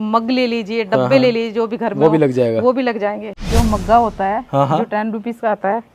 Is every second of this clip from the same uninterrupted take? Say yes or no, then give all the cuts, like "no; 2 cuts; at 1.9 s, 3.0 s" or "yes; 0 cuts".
no; 1 cut; at 3.3 s